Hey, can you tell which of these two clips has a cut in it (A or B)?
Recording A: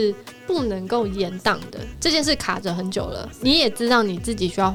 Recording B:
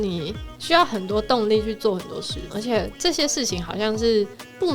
B